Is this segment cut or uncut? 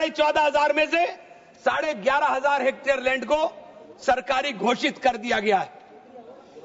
uncut